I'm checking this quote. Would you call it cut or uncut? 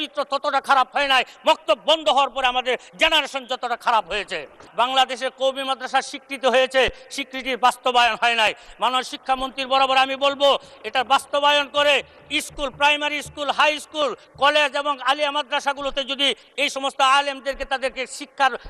cut